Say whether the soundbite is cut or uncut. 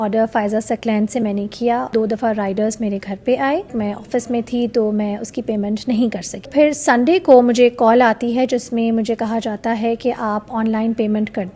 cut